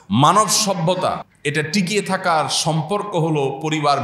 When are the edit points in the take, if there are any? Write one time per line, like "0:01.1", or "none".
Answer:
0:01.3

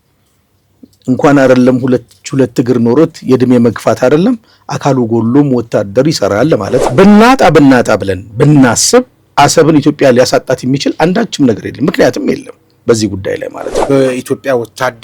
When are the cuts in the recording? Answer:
0:06.8
0:13.8

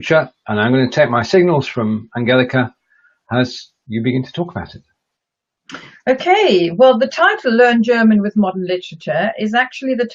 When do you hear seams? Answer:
0:07.1

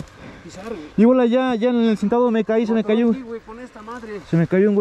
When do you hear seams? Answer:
none

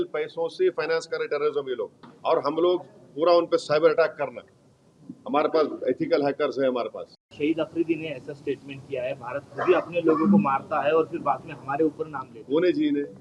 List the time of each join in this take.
0:02.0
0:07.2

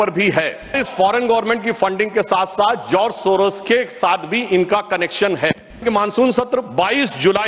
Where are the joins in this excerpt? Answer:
0:00.7
0:05.8

